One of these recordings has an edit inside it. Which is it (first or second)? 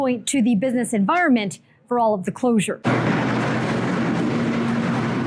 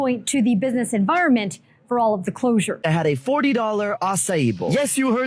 second